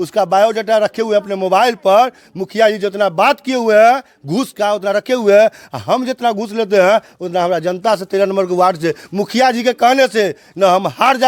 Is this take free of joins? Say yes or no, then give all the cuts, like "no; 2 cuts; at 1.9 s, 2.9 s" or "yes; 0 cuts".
yes; 0 cuts